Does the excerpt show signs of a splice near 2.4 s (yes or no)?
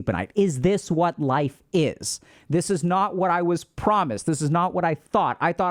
no